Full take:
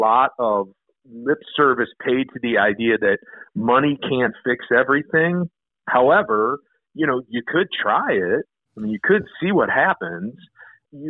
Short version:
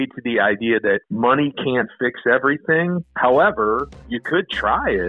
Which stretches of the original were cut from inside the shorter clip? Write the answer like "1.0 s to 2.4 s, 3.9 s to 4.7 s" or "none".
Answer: 3.3 s to 3.5 s, 5.5 s to 5.8 s, 6.8 s to 7.3 s